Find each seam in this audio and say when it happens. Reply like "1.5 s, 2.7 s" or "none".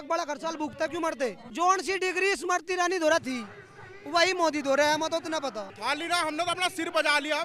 1.5 s, 5.7 s